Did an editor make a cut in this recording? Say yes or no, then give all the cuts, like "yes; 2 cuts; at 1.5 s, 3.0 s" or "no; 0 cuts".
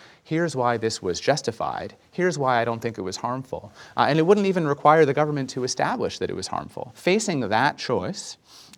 yes; 1 cut; at 6.8 s